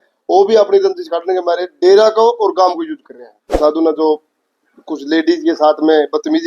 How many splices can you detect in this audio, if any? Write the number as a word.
one